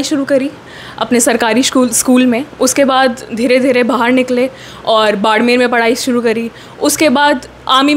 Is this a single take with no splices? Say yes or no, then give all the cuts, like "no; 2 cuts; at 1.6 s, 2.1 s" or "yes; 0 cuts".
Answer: yes; 0 cuts